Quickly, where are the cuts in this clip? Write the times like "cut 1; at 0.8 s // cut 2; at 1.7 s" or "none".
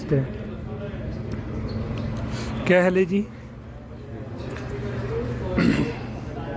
none